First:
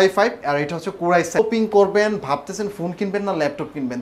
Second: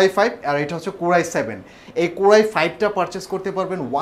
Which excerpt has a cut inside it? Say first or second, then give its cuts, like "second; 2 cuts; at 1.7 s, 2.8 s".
first; 1 cut; at 1.4 s